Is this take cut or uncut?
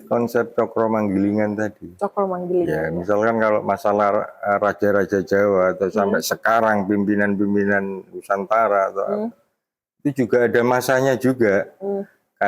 uncut